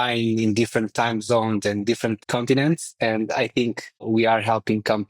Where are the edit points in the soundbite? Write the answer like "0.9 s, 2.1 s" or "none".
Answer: 2.2 s, 4.0 s